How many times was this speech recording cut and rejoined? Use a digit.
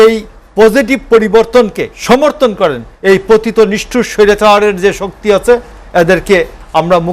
2